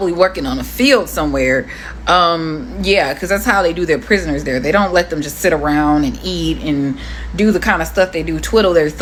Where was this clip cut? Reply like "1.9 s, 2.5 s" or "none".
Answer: none